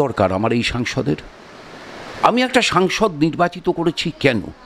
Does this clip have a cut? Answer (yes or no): no